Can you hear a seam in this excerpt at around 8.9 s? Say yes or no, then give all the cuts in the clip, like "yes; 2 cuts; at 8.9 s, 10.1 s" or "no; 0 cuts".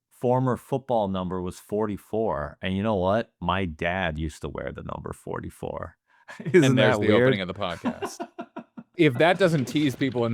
yes; 1 cut; at 8.9 s